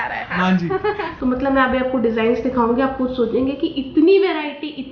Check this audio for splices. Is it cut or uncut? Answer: cut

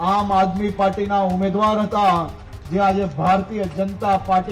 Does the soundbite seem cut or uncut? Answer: uncut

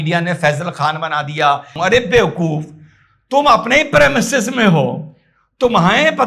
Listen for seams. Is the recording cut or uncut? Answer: cut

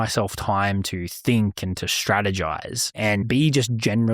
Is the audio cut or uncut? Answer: cut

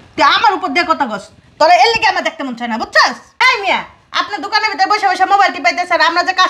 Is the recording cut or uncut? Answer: uncut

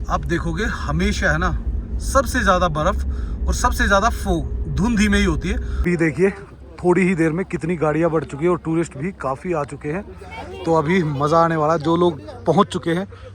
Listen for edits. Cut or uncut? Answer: cut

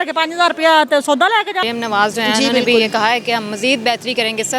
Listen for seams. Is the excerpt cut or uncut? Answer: cut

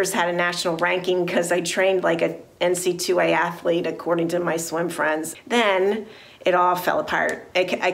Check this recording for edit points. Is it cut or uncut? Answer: uncut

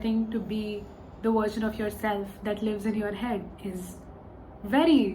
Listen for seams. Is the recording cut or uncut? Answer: uncut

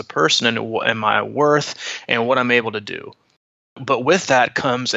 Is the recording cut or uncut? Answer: cut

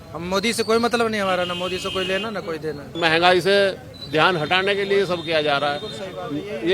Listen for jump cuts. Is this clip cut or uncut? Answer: cut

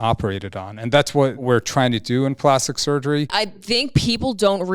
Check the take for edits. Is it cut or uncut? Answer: cut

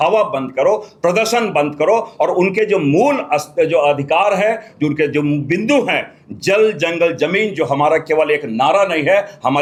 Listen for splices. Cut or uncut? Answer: uncut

